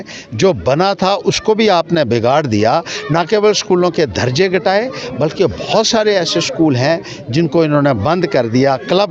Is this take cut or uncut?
uncut